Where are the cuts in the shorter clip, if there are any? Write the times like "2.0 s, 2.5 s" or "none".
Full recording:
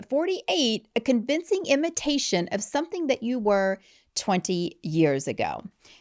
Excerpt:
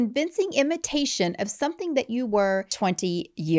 2.7 s